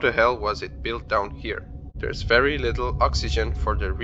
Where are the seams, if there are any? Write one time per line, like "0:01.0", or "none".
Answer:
0:01.8